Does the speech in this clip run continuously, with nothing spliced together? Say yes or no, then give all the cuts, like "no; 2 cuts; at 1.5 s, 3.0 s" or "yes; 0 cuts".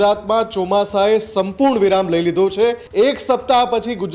no; 1 cut; at 2.8 s